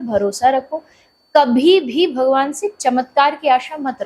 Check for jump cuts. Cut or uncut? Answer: uncut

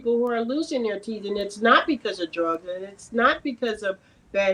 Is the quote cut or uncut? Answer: uncut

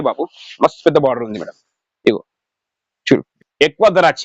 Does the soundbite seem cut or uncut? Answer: cut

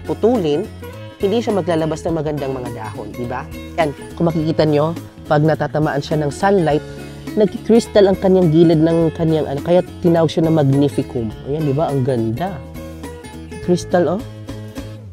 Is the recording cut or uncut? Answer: uncut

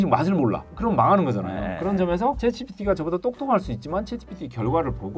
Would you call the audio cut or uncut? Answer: uncut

